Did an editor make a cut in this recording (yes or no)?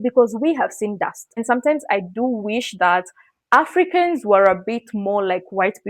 yes